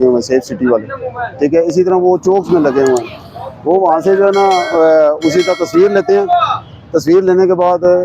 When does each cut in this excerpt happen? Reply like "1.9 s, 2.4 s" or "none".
none